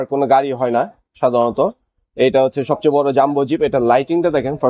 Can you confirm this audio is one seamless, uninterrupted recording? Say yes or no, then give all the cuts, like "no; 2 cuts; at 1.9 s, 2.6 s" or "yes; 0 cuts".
yes; 0 cuts